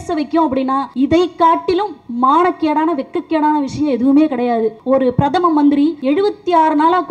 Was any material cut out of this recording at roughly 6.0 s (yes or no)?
yes